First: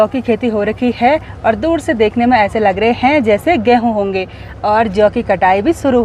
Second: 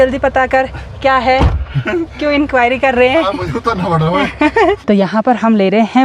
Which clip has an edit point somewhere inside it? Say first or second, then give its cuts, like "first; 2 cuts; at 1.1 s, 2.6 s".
second; 1 cut; at 4.8 s